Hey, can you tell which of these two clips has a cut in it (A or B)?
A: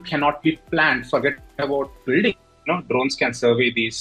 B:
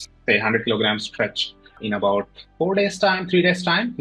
A